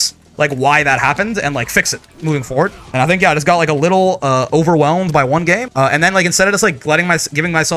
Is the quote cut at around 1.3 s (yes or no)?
no